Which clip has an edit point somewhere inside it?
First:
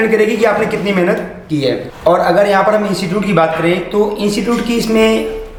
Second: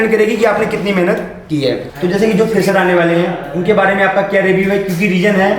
second; 1 cut; at 1.9 s

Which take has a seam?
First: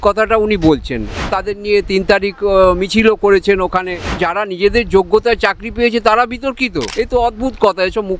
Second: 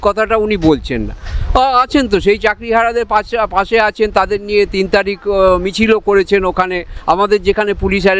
first; 3 cuts; at 1.4 s, 4.2 s, 6.8 s

